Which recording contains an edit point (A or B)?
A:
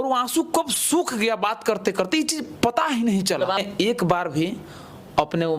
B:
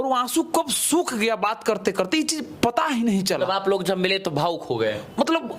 A